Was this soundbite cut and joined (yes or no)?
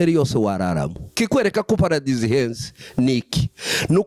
yes